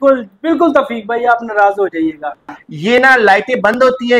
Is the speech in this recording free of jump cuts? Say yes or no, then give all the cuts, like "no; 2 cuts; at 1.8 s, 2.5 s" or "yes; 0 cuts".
no; 1 cut; at 2.5 s